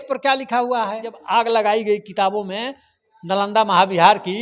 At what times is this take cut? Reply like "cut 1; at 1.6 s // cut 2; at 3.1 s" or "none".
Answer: cut 1; at 1.1 s